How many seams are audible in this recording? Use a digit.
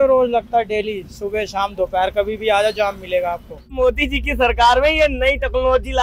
1